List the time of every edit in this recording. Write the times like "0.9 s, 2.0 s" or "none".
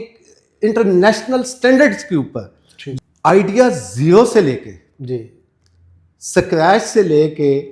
2.8 s